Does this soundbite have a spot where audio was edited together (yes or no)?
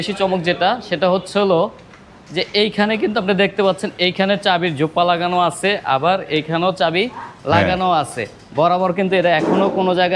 no